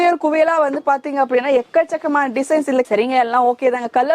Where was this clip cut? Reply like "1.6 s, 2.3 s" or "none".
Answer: none

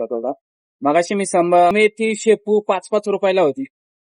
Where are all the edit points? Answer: 1.7 s

